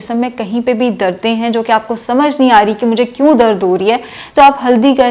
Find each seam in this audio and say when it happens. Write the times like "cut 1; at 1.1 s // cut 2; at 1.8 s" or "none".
none